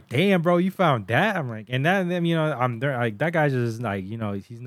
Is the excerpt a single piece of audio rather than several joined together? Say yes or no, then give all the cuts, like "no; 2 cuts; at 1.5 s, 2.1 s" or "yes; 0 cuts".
yes; 0 cuts